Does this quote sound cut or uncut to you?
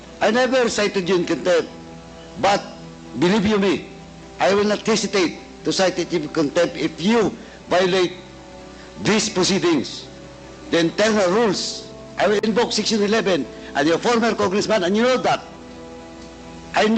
uncut